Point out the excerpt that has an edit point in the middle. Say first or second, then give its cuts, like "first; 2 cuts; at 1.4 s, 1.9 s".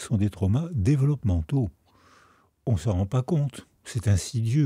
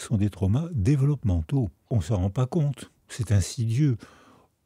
second; 1 cut; at 1.8 s